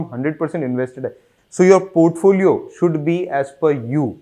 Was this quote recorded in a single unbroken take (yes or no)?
no